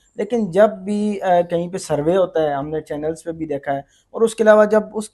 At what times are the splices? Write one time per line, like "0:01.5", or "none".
none

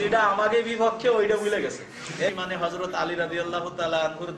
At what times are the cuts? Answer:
0:02.3

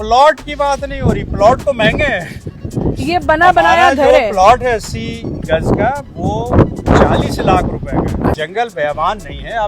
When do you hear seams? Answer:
0:08.4

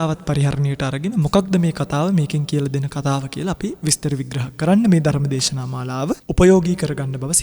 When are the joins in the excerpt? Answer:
0:06.3

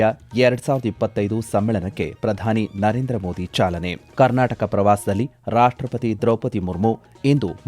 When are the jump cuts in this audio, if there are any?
0:04.0

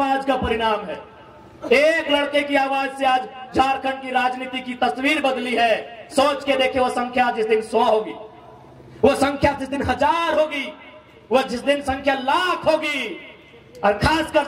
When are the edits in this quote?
none

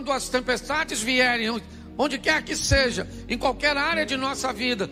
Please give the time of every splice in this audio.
none

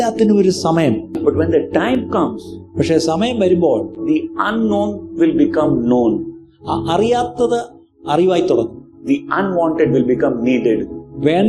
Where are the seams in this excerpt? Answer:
0:01.2

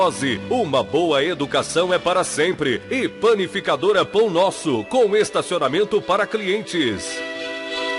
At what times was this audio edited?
0:07.1

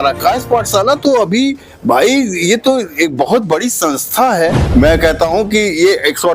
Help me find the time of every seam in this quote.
0:04.6

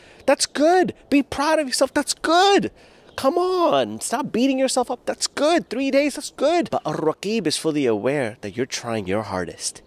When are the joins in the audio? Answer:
0:06.7

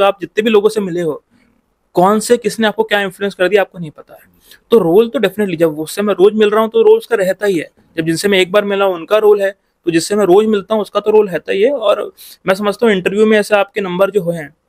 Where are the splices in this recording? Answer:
none

